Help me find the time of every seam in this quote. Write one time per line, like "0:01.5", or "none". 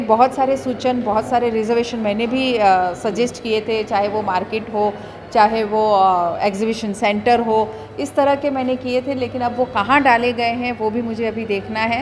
none

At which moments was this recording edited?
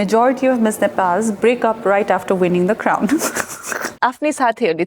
0:03.9

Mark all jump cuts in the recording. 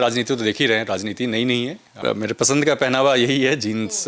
0:02.0

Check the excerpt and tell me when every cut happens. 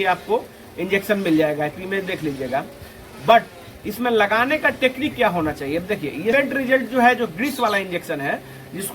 0:06.3

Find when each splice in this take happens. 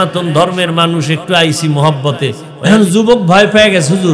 0:02.5

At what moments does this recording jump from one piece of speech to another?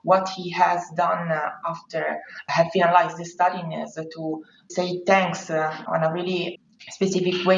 none

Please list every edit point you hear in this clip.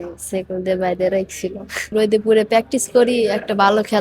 0:01.9

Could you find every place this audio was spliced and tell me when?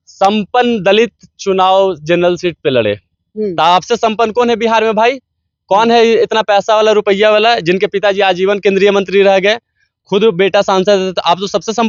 none

